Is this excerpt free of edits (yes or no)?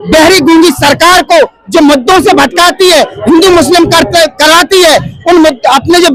yes